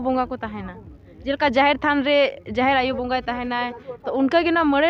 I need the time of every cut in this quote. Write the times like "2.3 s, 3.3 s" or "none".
none